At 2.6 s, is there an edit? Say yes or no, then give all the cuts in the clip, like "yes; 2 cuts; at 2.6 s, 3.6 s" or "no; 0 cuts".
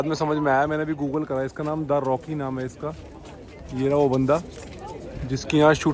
no; 0 cuts